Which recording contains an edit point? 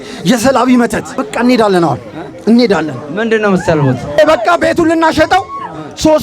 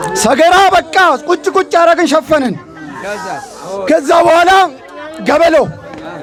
first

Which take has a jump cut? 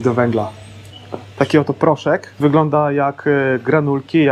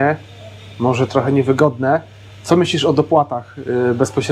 first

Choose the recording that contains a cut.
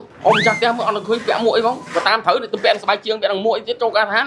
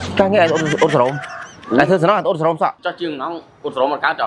second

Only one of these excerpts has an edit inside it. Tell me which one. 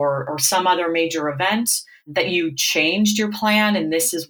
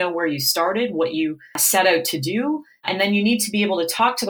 second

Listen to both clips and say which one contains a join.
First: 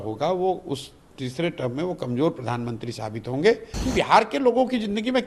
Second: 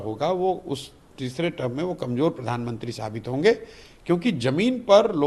first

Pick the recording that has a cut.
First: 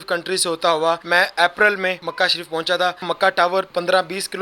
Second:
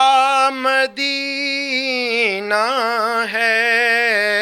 first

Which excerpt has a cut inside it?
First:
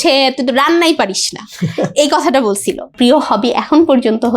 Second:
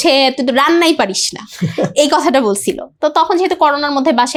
first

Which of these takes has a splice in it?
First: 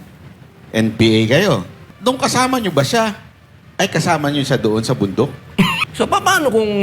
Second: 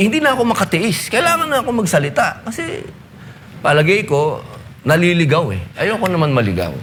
first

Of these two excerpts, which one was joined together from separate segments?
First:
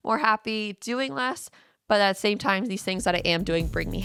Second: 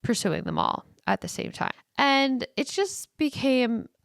second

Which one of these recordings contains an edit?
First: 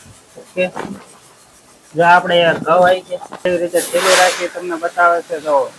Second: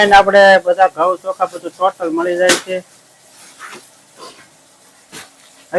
first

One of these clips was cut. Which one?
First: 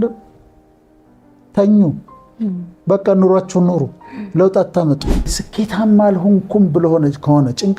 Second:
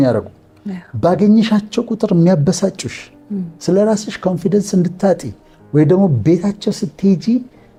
first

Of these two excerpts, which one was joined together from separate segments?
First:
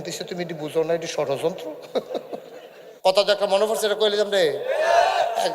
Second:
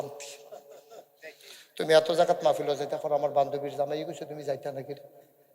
first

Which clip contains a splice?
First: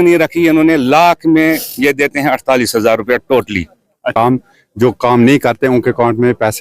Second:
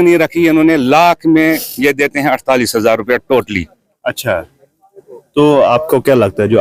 first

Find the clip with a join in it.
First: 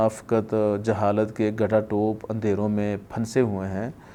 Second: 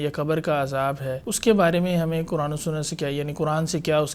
second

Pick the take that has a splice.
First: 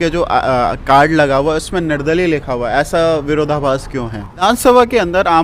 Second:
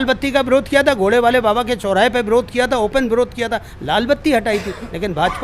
first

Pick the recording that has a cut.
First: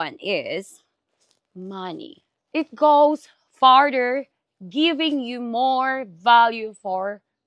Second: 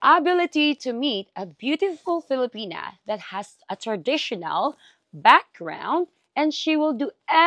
first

